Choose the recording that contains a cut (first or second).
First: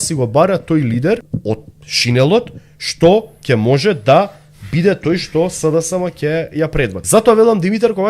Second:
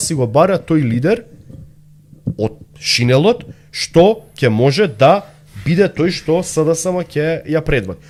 first